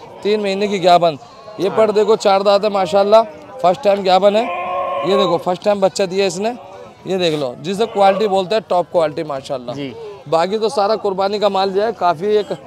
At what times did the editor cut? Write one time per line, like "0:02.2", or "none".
none